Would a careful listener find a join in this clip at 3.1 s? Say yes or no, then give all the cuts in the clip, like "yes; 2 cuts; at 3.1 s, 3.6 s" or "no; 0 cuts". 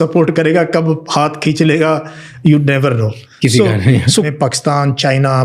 no; 1 cut; at 4.3 s